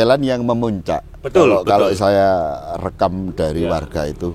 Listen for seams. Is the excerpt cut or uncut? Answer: uncut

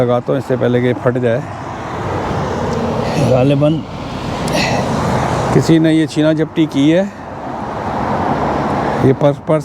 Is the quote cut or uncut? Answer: uncut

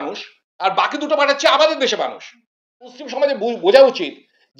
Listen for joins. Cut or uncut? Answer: cut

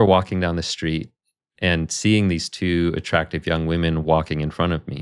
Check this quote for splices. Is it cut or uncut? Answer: uncut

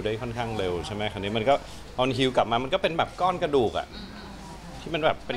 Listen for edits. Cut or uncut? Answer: uncut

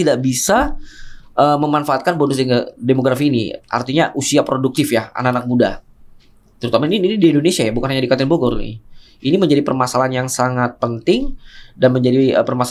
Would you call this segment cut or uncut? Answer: uncut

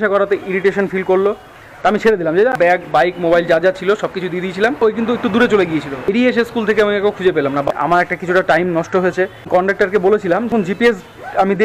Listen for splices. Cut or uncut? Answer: cut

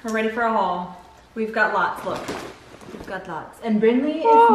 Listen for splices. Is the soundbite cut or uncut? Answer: uncut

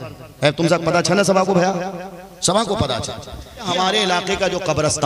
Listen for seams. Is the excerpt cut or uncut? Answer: cut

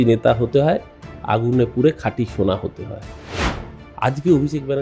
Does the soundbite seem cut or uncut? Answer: uncut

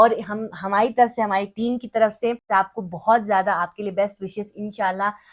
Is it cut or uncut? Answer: cut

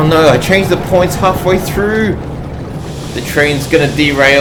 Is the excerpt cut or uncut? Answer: uncut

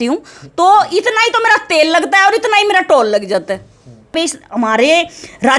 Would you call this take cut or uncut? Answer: cut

